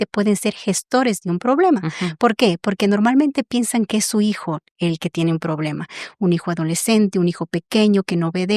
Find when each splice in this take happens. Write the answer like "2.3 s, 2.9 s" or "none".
none